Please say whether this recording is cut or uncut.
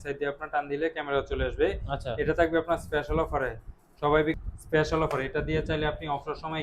cut